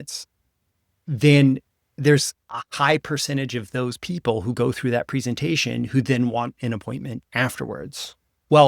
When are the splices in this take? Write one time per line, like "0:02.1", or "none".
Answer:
0:01.0